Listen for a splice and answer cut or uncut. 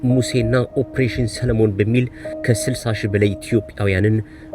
cut